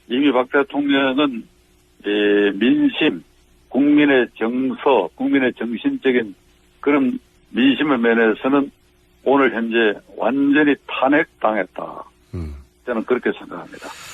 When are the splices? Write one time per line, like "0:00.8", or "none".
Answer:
none